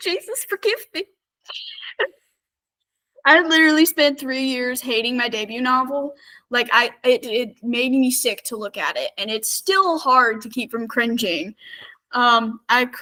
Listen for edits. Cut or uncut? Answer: uncut